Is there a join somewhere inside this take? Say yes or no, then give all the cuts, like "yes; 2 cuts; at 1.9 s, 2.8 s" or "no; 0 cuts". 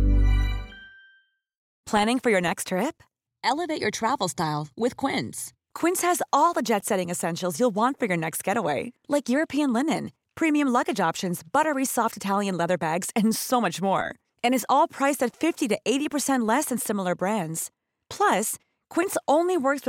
yes; 1 cut; at 1.7 s